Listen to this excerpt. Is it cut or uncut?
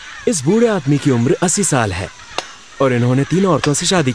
uncut